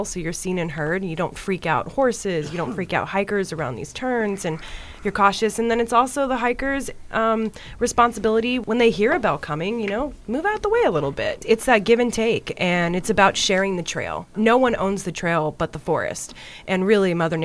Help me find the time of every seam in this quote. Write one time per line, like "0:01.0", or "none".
0:08.6
0:11.4
0:14.3